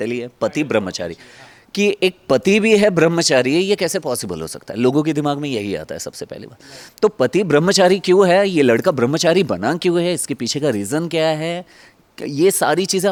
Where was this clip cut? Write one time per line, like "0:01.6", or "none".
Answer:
none